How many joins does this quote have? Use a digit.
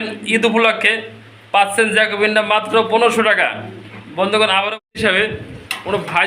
1